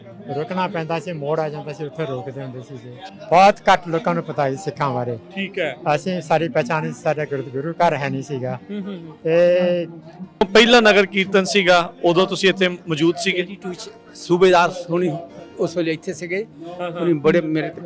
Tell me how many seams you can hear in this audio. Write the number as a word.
two